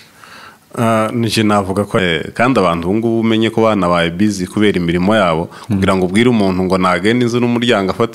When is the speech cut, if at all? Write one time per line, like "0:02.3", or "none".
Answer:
0:02.0